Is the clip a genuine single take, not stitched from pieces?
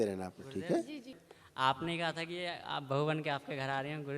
no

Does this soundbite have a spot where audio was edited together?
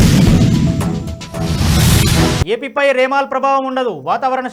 no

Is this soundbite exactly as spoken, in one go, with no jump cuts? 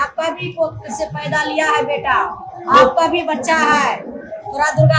yes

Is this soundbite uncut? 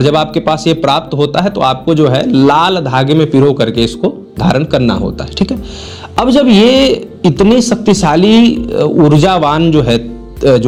yes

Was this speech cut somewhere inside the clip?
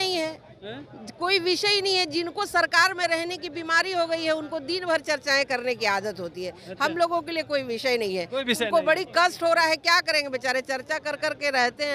no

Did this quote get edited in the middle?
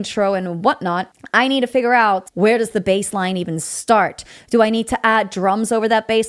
yes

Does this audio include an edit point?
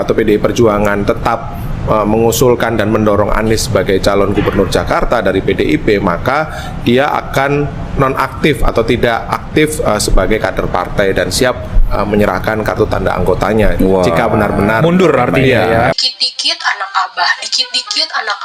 yes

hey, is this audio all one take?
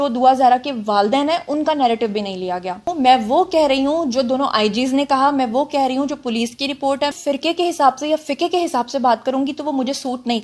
no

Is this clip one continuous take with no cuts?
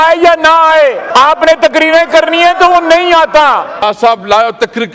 no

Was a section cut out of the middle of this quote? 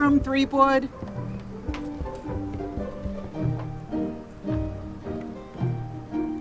yes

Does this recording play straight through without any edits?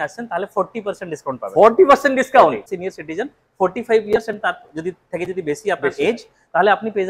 no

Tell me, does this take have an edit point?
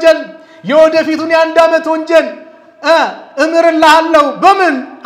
no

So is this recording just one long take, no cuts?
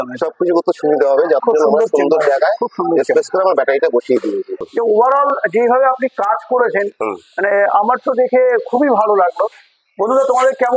no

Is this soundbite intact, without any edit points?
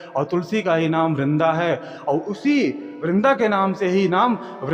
yes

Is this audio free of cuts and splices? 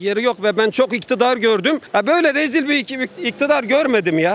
no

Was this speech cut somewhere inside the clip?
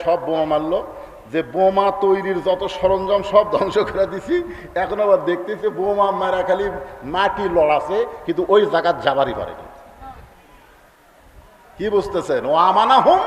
no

